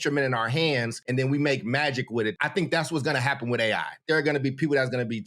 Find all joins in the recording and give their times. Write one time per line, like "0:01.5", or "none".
0:01.0
0:02.3
0:04.0